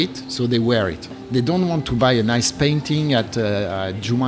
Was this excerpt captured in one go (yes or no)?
no